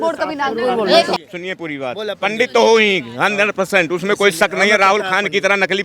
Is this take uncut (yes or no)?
no